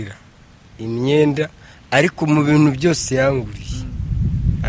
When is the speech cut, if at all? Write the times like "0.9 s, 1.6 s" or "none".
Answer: none